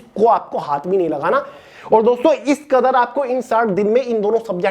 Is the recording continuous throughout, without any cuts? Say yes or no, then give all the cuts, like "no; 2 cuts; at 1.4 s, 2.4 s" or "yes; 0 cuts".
no; 1 cut; at 1.7 s